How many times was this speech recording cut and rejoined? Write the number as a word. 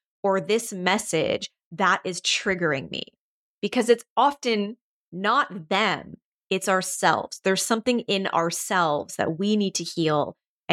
zero